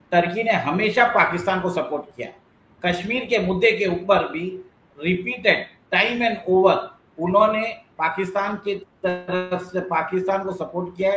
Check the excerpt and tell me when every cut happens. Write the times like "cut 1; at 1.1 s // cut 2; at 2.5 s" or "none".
none